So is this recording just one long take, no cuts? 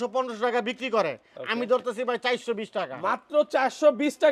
yes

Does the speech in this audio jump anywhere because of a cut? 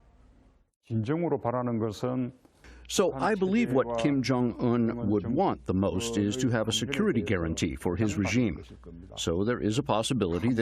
no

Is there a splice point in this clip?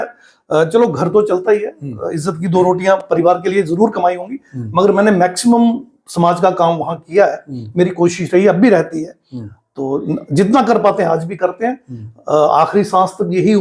no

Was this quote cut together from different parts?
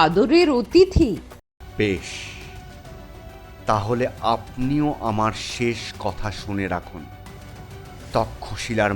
yes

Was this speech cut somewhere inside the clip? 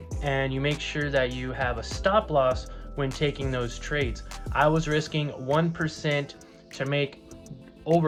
no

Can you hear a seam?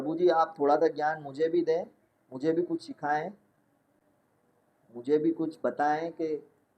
no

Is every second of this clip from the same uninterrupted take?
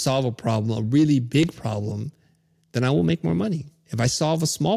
yes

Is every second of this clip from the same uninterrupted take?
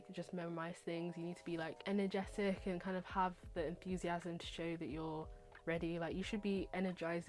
no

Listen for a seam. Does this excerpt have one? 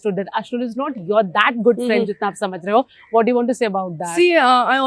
no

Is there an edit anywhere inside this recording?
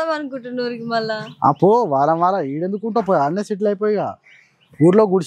no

